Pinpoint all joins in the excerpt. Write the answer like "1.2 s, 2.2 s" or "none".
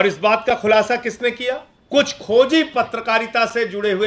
1.7 s